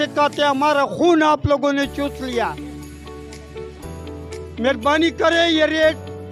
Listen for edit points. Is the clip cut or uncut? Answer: uncut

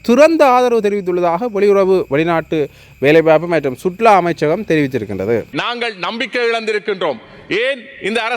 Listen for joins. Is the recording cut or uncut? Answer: cut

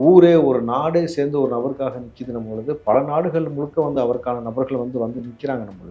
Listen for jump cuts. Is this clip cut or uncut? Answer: uncut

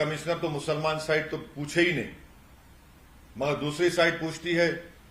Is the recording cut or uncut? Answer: uncut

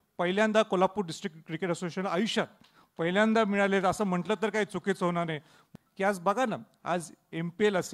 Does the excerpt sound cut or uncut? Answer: cut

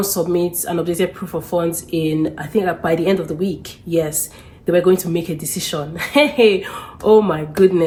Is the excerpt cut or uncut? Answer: uncut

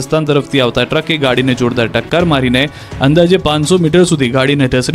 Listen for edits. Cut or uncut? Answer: uncut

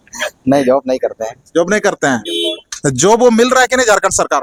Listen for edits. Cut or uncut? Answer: uncut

